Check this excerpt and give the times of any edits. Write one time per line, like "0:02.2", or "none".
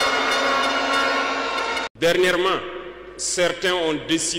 0:01.8

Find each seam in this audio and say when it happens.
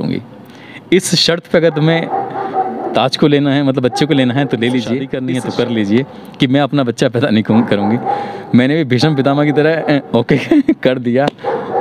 0:05.1

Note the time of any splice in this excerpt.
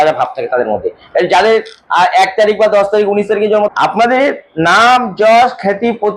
0:03.7

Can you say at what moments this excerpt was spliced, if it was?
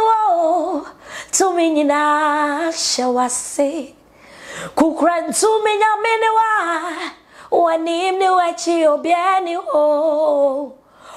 none

